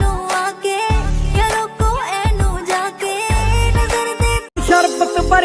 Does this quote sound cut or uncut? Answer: cut